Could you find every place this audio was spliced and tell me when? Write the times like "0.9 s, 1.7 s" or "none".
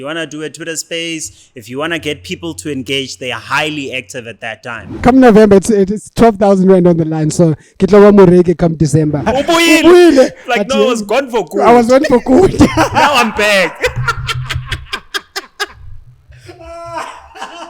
5.0 s, 9.3 s

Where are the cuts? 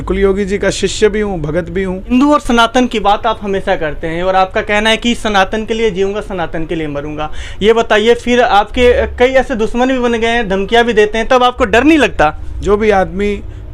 2.1 s, 12.5 s

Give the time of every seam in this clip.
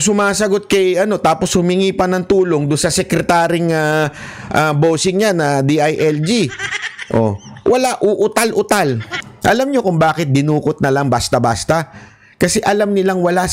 9.2 s

